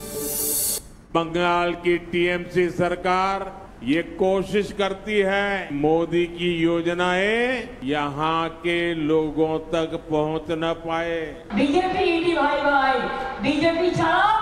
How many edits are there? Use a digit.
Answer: 1